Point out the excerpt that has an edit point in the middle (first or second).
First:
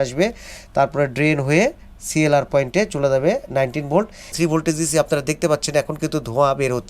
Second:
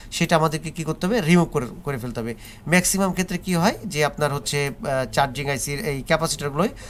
first